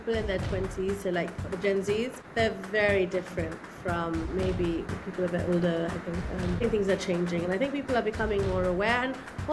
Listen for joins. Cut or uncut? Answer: uncut